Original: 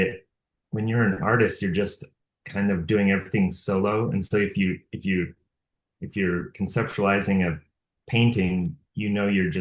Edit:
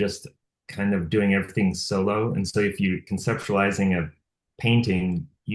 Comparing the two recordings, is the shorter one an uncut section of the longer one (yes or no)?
no